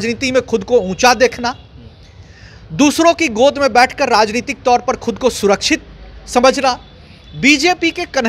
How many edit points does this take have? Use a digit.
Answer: 0